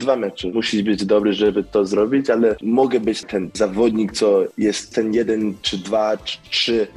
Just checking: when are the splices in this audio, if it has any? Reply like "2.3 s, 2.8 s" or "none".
3.3 s